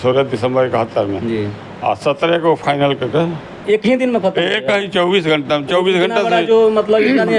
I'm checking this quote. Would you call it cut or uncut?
uncut